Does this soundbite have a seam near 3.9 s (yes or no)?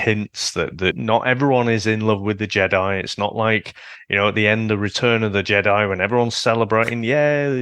no